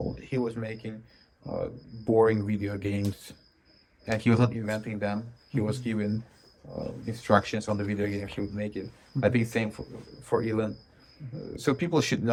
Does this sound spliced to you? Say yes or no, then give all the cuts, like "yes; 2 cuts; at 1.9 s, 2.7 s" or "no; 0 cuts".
no; 0 cuts